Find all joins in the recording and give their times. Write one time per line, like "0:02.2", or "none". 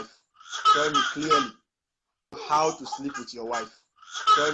0:02.4